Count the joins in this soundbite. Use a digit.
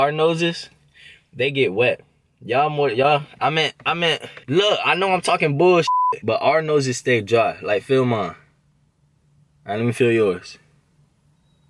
0